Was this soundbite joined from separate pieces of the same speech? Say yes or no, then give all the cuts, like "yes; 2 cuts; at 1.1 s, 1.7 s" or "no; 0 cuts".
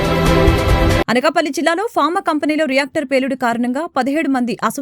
yes; 1 cut; at 0.9 s